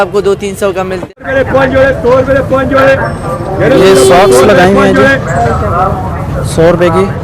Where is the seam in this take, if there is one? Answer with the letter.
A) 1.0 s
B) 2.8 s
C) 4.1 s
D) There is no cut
A